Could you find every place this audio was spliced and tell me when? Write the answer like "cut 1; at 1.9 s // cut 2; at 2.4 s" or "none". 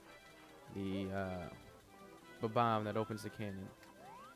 cut 1; at 3.2 s